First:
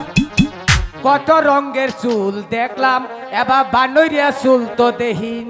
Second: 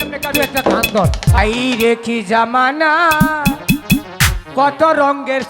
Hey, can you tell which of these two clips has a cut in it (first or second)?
second